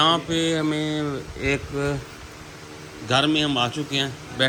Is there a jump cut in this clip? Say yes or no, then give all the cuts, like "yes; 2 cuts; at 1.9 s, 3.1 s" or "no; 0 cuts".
no; 0 cuts